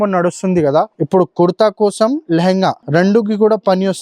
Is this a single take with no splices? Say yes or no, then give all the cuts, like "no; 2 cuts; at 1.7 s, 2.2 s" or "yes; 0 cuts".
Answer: no; 2 cuts; at 1.0 s, 2.8 s